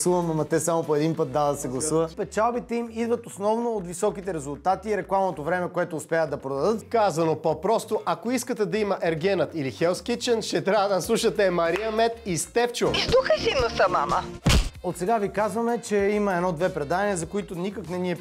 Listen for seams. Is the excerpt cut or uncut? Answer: cut